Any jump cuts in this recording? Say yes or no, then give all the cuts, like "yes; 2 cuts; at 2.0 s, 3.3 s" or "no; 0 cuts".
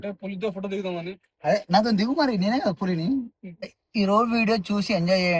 yes; 1 cut; at 3.8 s